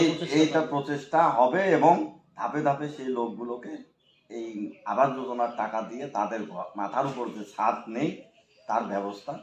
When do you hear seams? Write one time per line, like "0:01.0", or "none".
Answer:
none